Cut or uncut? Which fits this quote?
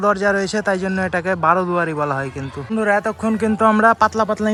uncut